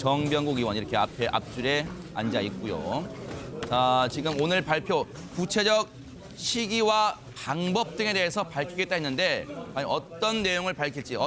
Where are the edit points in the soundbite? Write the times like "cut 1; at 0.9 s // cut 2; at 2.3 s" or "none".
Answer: cut 1; at 6.0 s